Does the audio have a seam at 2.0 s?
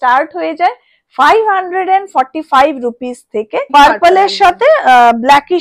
no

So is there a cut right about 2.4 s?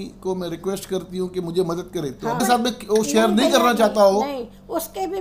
yes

